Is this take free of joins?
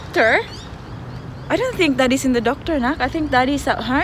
yes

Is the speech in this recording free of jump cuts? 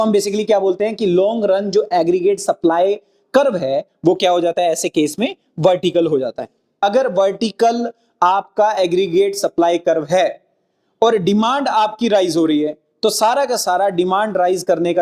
no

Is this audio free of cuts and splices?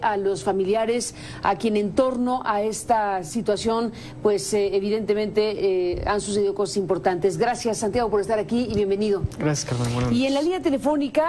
yes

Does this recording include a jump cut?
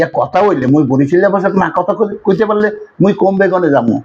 no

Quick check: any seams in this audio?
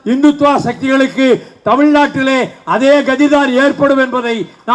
no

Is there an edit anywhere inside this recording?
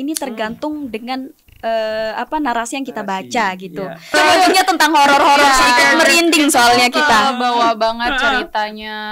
yes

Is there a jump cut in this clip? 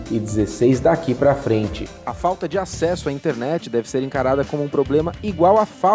yes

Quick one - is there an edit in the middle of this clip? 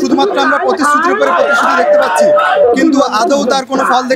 no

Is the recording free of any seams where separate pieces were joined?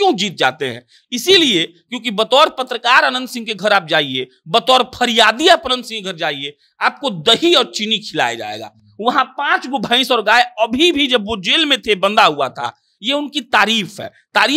yes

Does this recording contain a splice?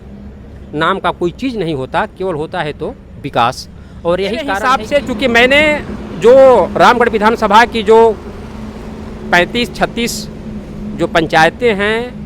yes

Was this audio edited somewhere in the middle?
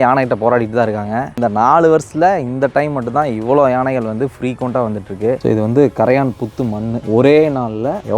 yes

